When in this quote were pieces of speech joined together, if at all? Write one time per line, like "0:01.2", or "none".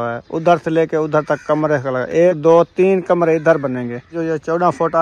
0:02.4
0:04.2